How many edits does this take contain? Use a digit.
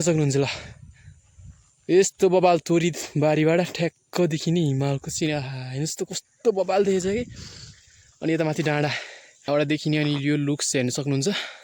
1